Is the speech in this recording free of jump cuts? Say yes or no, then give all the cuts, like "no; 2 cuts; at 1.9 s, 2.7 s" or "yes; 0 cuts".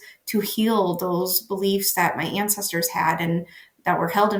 yes; 0 cuts